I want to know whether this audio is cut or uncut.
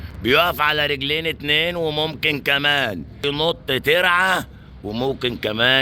uncut